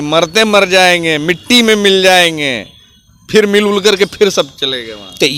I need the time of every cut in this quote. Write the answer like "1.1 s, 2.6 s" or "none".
none